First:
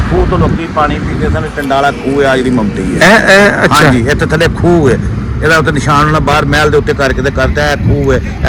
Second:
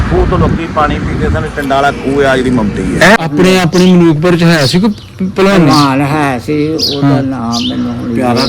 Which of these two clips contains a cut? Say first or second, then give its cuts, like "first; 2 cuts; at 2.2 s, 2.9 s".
second; 1 cut; at 3.2 s